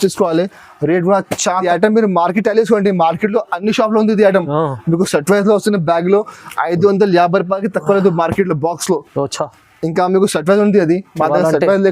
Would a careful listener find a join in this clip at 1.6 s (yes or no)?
yes